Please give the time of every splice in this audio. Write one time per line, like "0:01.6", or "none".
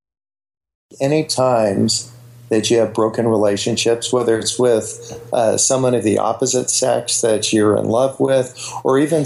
0:00.9

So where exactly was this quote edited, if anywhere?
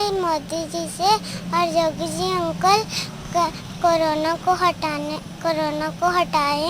none

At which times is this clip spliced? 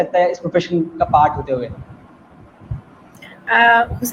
none

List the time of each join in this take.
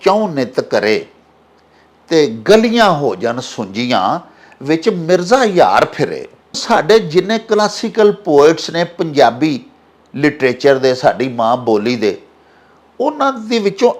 0:06.6

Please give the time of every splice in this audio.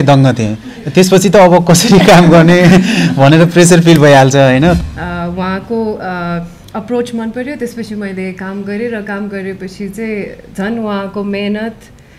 0:04.8

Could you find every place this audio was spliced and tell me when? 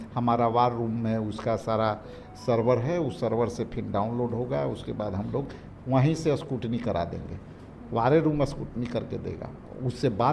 none

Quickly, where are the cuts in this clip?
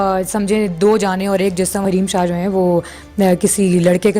0:01.8

